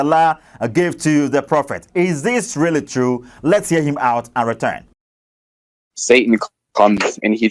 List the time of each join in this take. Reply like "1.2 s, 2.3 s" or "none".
none